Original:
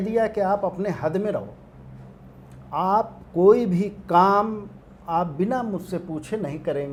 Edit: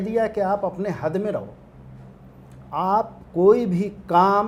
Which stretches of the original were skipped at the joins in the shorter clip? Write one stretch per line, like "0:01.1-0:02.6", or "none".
none